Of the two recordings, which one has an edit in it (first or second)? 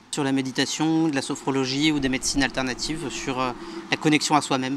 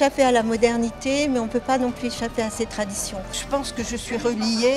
second